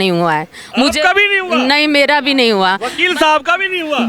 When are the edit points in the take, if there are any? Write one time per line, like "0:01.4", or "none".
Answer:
none